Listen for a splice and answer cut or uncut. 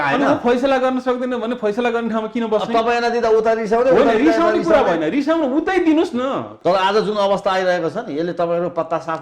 cut